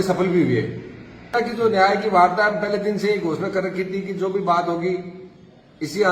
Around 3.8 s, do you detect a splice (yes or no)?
no